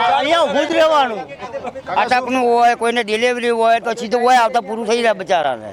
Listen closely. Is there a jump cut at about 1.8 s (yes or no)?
no